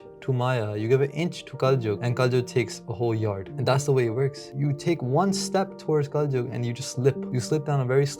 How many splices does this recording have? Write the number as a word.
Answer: four